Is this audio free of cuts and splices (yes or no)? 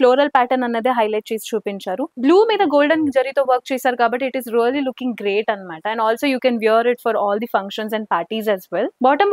yes